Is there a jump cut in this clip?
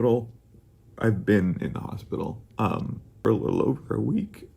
yes; 1 cut; at 3.3 s

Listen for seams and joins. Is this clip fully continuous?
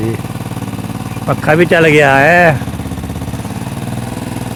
yes; 0 cuts

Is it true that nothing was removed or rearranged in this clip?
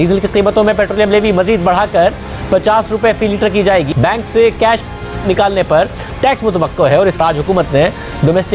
no; 2 cuts; at 3.9 s, 7.2 s

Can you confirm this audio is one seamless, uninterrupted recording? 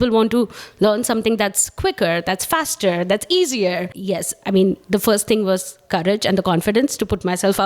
no; 1 cut; at 3.9 s

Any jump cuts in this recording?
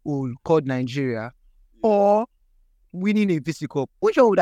no; 0 cuts

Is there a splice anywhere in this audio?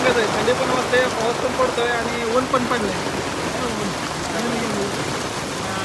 no; 0 cuts

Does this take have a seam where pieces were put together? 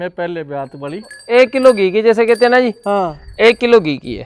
yes; 1 cut; at 1.2 s

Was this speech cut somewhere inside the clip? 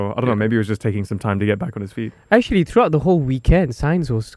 no; 0 cuts

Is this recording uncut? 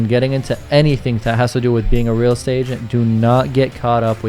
yes; 0 cuts

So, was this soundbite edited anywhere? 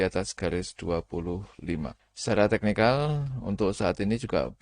yes; 1 cut; at 2.1 s

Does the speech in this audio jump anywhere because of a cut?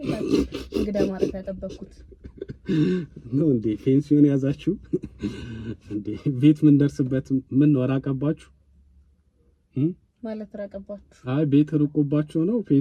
no; 0 cuts

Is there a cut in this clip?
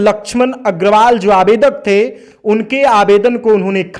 no; 0 cuts

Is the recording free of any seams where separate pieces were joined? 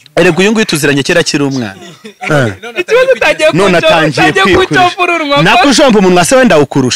yes; 0 cuts

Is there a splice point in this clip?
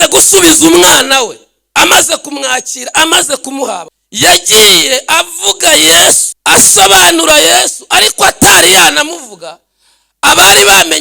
yes; 2 cuts; at 4.0 s, 6.3 s

